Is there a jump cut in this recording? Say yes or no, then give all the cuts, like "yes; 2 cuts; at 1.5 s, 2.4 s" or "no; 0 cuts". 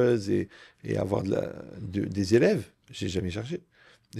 no; 0 cuts